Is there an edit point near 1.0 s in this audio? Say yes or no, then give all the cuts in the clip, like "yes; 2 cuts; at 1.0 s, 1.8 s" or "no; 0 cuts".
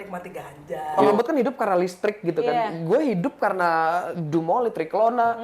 yes; 1 cut; at 1.0 s